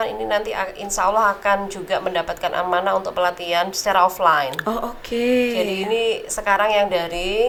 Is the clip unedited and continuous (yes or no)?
yes